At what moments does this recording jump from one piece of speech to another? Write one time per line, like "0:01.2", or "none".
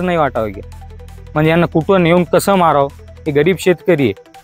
0:03.2